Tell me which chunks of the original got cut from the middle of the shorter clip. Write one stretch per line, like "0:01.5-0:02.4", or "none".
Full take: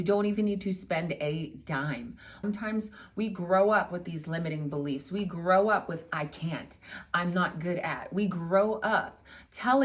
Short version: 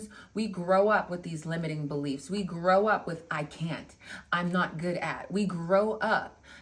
none